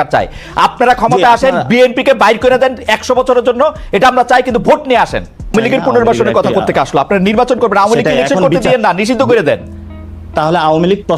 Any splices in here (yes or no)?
yes